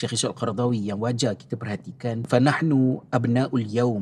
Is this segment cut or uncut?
cut